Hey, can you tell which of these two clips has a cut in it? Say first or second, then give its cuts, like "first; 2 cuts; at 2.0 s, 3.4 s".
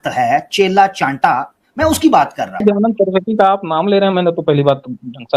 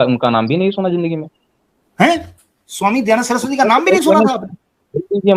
first; 1 cut; at 2.6 s